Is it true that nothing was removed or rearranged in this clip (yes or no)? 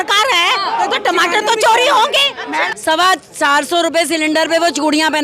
no